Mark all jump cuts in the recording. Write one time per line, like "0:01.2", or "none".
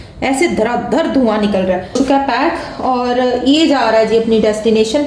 0:01.9

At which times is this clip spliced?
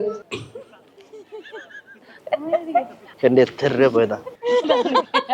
0:02.1

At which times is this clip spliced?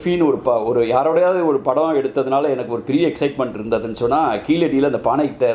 none

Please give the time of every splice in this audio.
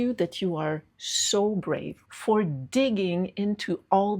0:02.0

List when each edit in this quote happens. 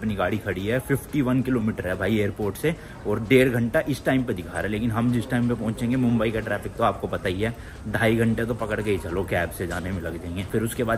none

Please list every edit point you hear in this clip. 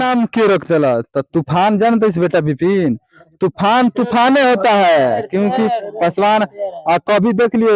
none

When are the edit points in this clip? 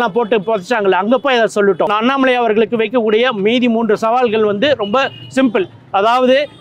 0:01.9

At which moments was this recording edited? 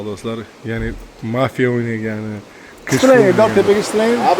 0:03.0

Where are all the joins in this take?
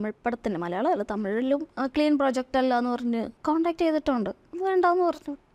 0:01.7
0:03.3

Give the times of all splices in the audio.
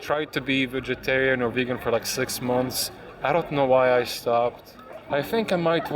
0:05.1

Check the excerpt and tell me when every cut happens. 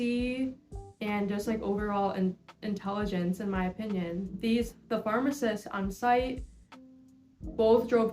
0:04.3

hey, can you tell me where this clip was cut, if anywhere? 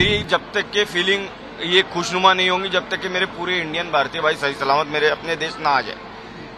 none

